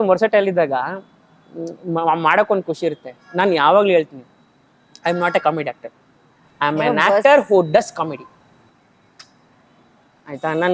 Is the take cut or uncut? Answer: uncut